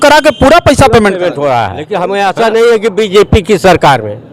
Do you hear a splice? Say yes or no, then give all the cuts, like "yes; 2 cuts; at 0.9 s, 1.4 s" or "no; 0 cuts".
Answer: yes; 1 cut; at 1.8 s